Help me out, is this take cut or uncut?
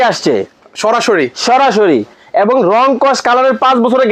uncut